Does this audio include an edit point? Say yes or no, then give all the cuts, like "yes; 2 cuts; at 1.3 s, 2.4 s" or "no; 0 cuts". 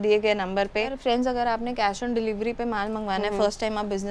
yes; 1 cut; at 1.0 s